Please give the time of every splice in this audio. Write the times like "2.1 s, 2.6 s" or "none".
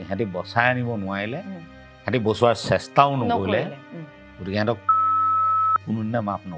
none